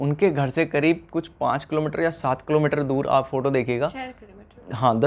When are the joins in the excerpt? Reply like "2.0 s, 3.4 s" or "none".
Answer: none